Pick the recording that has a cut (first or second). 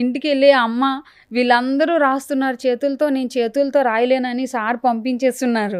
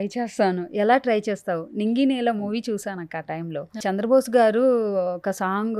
second